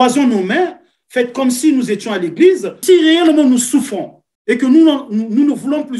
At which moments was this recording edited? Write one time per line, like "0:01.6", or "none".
0:02.8

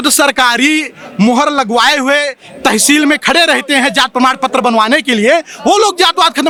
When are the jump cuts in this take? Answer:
none

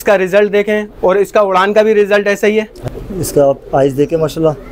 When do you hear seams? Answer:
0:02.8

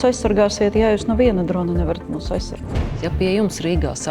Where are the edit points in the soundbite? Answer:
0:02.6

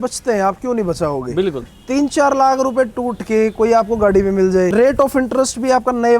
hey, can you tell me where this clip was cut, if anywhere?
0:01.6
0:04.7

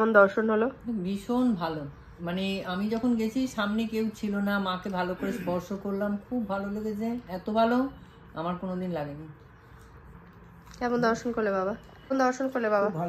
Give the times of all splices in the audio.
none

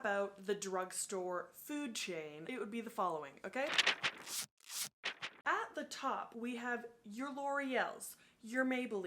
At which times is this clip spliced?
0:02.4
0:06.3

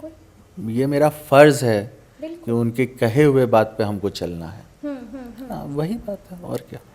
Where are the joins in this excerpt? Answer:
none

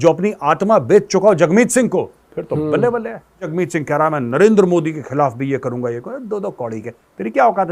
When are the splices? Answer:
0:03.5

